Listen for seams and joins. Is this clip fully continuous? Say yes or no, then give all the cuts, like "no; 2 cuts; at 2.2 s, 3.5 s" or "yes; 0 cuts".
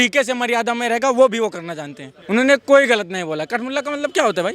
no; 1 cut; at 2.1 s